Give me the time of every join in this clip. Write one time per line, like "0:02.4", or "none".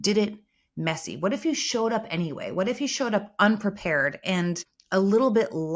0:04.7